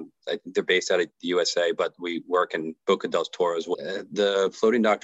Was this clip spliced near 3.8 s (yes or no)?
yes